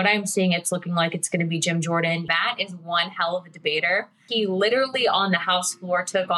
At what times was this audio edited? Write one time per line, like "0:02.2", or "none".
0:02.2
0:04.2